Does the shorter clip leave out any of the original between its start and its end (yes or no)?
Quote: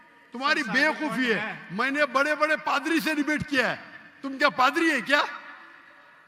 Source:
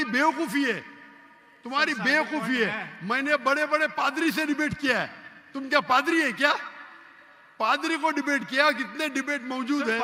no